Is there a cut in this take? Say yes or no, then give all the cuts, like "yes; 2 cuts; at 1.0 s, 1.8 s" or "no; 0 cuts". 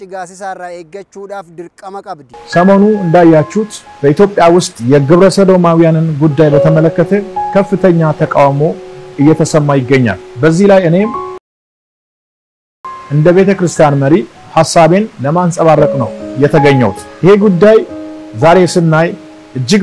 yes; 1 cut; at 2.3 s